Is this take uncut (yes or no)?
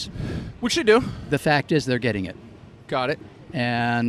yes